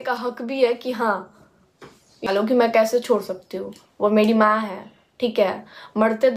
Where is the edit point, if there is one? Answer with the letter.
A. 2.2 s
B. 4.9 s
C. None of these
A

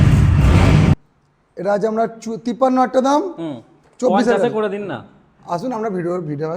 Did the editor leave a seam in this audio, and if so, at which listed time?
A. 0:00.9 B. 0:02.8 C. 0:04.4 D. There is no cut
A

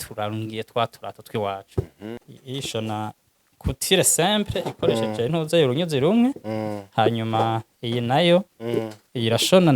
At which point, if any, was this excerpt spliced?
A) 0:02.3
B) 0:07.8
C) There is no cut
A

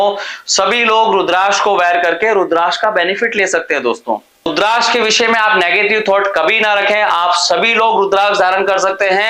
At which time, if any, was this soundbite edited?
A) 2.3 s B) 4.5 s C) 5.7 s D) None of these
B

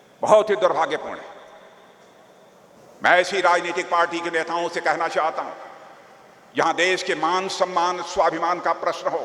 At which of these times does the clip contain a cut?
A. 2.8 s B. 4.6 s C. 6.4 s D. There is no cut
A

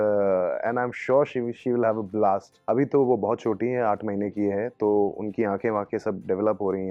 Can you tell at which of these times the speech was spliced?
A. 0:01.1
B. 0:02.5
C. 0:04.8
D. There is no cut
B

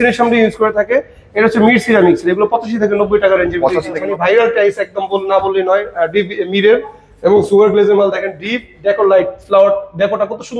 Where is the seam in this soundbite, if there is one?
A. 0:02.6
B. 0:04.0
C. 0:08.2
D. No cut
B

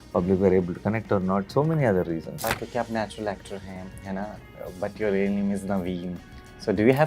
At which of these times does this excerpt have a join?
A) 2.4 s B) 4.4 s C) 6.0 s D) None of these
A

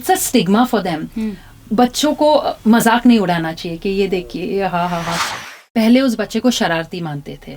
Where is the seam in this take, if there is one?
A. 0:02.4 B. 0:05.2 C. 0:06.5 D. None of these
B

